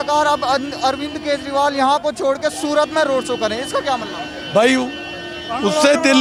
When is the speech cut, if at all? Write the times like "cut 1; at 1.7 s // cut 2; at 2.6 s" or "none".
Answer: none